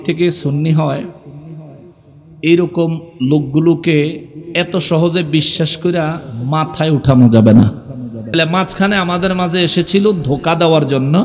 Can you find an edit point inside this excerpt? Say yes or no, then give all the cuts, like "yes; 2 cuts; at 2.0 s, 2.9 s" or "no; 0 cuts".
yes; 1 cut; at 8.3 s